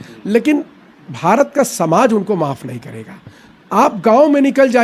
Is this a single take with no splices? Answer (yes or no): yes